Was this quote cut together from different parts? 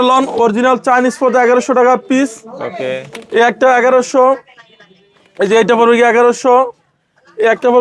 no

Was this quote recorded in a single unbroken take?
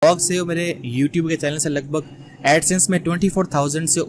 yes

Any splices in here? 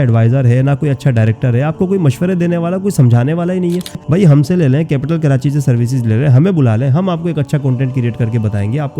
yes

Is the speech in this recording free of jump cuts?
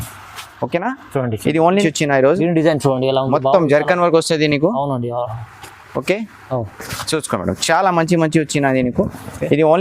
no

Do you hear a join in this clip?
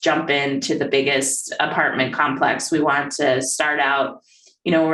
no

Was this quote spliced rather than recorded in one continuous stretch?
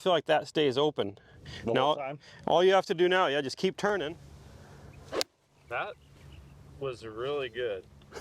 yes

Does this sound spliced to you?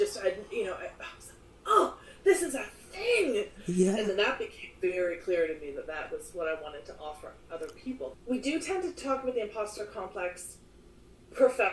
yes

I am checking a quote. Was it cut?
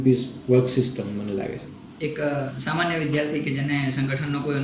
no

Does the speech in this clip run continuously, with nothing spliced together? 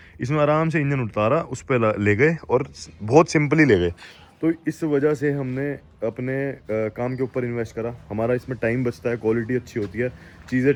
yes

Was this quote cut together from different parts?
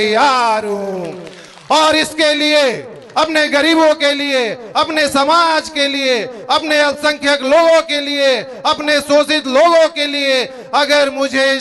no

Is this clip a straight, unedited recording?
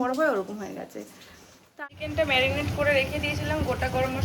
no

